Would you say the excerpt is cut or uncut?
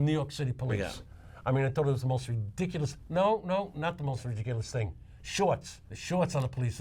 cut